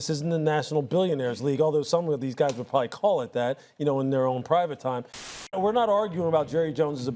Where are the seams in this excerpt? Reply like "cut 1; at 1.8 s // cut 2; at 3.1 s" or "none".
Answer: cut 1; at 5.5 s